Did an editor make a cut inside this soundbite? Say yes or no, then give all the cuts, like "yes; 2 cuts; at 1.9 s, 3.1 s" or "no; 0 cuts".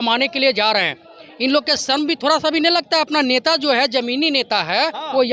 no; 0 cuts